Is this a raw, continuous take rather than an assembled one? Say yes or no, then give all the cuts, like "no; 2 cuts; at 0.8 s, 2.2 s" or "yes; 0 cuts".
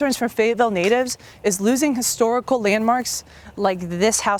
yes; 0 cuts